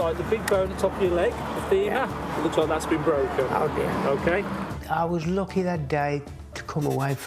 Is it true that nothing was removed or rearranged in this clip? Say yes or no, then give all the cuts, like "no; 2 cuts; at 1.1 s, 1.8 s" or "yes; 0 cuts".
no; 1 cut; at 4.6 s